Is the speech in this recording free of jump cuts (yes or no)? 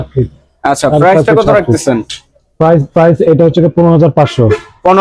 yes